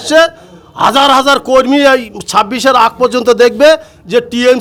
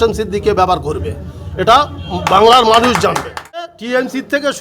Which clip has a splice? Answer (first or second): second